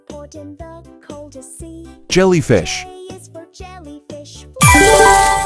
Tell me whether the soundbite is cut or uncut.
cut